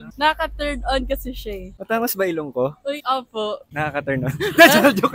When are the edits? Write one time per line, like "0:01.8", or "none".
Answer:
0:01.7
0:03.7